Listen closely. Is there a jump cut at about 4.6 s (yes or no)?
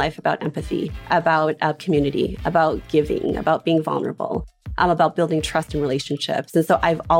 no